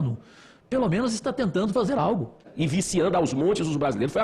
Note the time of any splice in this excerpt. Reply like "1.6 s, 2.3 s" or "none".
2.5 s